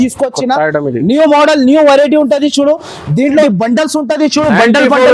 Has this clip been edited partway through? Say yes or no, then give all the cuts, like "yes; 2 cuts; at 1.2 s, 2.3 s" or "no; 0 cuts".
yes; 1 cut; at 3.5 s